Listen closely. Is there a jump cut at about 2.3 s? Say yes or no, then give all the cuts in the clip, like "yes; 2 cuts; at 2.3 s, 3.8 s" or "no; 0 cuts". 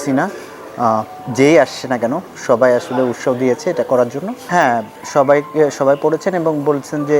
no; 1 cut; at 4.4 s